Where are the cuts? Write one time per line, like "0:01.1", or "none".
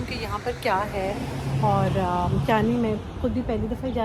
none